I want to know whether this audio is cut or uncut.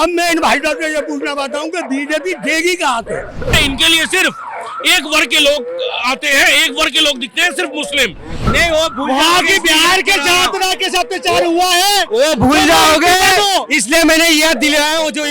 cut